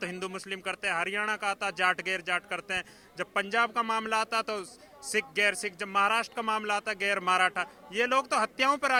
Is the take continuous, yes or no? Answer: yes